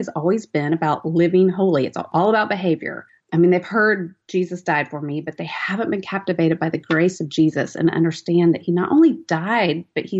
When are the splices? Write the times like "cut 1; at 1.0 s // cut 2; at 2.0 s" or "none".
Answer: cut 1; at 2.1 s